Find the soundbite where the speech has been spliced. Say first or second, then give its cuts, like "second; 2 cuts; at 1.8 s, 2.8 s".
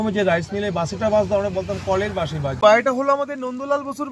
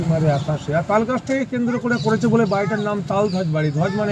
first; 1 cut; at 2.6 s